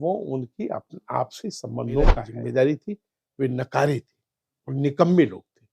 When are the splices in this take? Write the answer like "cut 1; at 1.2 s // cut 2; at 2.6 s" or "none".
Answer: cut 1; at 2.3 s